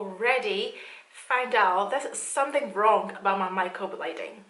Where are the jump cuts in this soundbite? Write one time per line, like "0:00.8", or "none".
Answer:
none